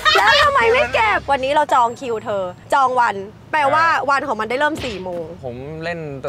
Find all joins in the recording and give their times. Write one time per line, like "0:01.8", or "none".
0:01.2
0:02.6
0:05.4